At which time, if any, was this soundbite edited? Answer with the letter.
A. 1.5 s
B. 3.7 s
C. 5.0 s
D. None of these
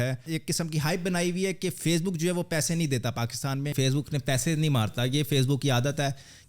B